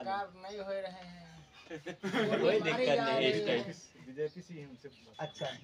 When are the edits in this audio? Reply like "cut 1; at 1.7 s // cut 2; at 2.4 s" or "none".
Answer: none